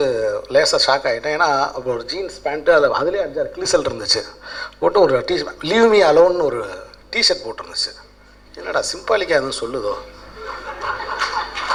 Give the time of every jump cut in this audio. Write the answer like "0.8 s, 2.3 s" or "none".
none